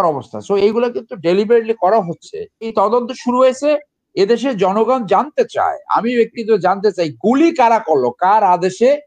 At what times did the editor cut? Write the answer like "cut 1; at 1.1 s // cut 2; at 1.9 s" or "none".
cut 1; at 2.7 s